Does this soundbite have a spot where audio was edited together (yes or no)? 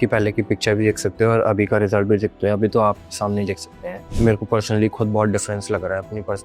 yes